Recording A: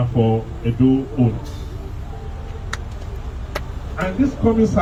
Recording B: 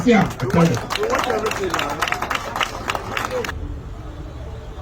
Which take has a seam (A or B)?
B